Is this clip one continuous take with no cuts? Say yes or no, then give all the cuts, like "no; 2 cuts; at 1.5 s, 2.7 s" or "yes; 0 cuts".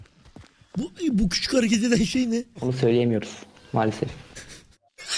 no; 1 cut; at 2.6 s